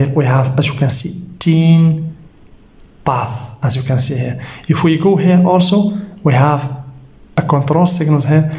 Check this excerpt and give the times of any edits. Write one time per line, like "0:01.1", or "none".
none